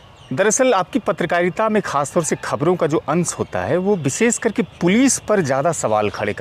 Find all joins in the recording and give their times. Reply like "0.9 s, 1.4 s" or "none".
none